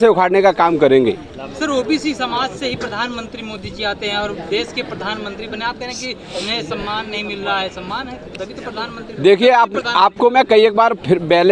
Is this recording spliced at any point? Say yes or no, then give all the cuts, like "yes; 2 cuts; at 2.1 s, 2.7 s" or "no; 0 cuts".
no; 0 cuts